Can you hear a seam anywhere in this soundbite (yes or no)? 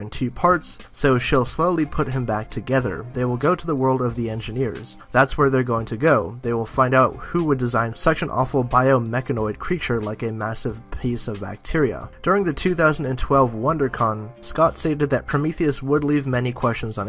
yes